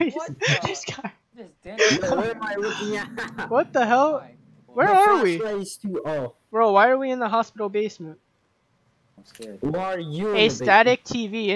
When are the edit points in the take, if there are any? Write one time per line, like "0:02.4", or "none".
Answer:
none

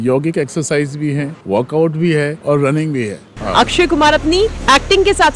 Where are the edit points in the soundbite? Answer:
0:01.3
0:02.4
0:03.4
0:04.6

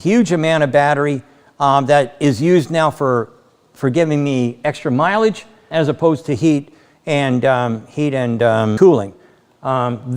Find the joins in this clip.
0:05.6
0:08.8

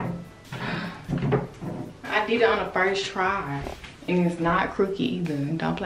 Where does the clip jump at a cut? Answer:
none

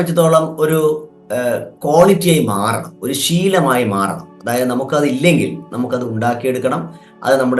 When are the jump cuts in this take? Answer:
none

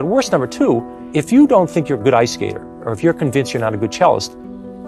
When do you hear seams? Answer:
0:01.0

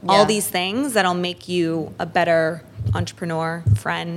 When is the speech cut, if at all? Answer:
0:02.7

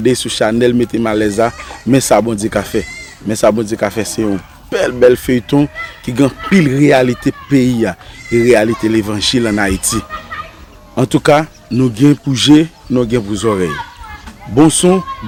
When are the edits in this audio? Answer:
none

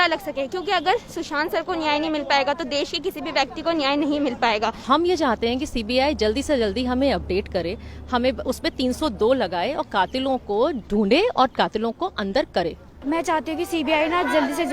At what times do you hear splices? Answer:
0:04.8
0:12.9

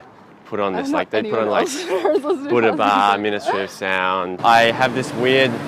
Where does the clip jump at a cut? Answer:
0:04.3

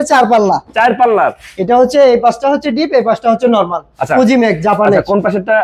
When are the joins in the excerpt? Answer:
none

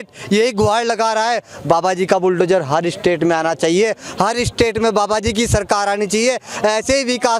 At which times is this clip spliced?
none

